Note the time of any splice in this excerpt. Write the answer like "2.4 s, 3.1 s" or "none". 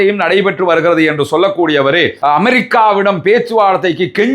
2.1 s